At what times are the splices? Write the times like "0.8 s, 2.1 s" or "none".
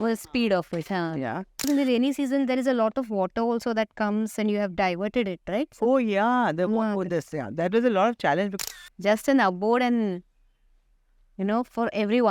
1.7 s, 8.6 s